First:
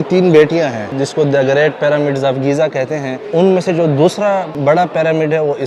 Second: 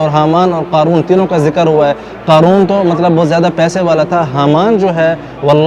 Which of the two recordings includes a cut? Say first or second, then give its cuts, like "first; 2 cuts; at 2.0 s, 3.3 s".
first; 3 cuts; at 1.0 s, 3.2 s, 4.5 s